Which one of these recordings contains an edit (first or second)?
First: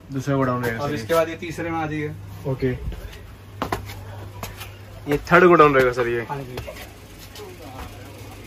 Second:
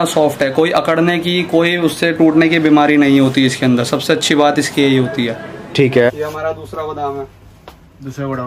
second